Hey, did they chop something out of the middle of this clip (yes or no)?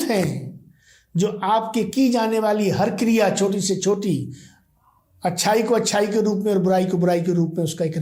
no